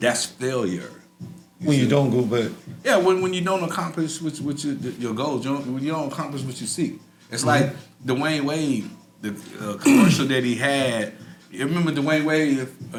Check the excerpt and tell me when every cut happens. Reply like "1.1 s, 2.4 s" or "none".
none